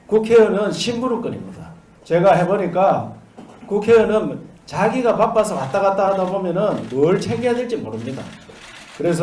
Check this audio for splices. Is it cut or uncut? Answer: uncut